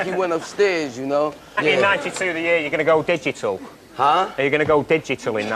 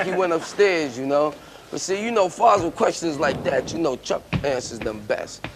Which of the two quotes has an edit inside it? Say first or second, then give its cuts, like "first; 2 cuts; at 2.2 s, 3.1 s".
second; 1 cut; at 1.5 s